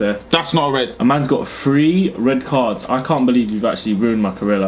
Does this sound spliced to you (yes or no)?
yes